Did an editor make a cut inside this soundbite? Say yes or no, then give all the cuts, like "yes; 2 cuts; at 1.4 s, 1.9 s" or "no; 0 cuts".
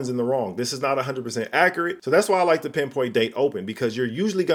no; 0 cuts